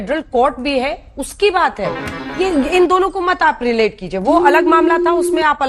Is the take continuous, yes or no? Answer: yes